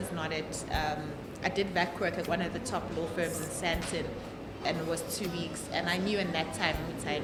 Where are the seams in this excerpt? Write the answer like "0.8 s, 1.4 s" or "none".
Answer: none